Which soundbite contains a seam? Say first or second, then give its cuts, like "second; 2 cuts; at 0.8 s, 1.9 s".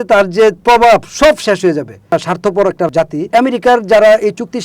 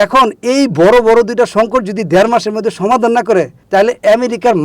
first; 2 cuts; at 2.1 s, 3.3 s